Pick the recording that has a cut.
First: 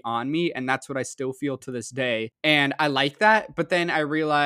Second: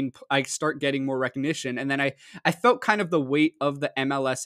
first; 1 cut; at 2.3 s

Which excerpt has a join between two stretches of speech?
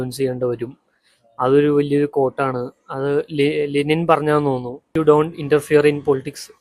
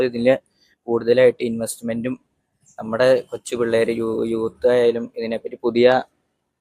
first; 1 cut; at 4.8 s

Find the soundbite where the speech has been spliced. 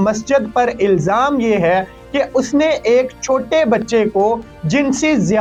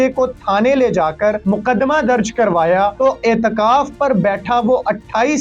second; 2 cuts; at 1.4 s, 2.9 s

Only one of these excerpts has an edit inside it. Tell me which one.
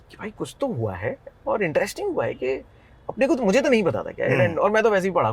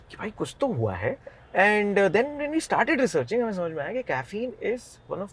second; 1 cut; at 1.3 s

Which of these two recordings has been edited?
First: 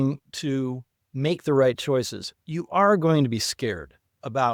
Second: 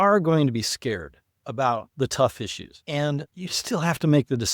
second; 2 cuts; at 2.7 s, 3.3 s

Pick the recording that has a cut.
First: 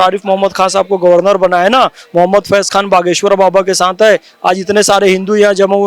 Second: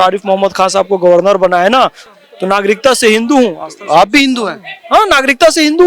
second; 1 cut; at 2.0 s

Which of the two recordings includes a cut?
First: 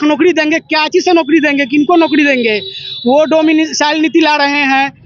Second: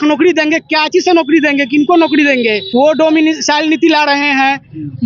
second; 1 cut; at 2.6 s

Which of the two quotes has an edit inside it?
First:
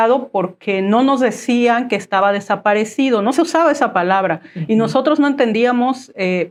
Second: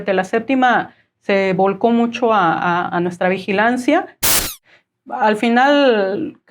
second; 1 cut; at 4.3 s

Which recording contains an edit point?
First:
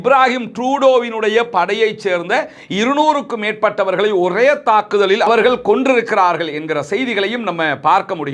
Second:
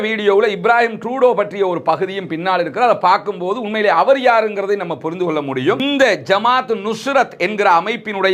second; 1 cut; at 5.8 s

